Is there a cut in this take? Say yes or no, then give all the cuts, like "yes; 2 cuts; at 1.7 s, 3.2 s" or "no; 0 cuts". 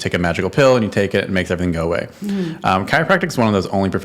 no; 0 cuts